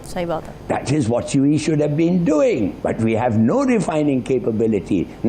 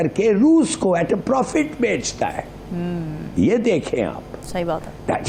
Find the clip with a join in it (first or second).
first